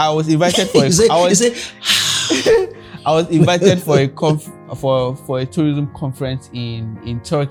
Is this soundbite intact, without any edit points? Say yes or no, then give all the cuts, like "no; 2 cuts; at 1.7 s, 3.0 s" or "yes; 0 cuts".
yes; 0 cuts